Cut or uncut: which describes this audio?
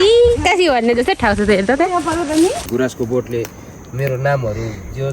cut